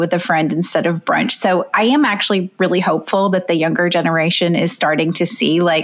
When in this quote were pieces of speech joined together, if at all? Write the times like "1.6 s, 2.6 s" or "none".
none